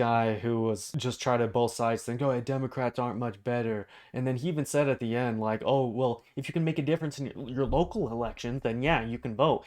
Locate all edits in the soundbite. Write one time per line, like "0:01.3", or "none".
0:00.9